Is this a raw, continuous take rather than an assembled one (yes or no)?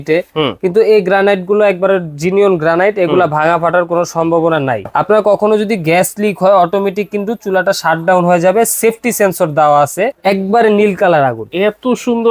no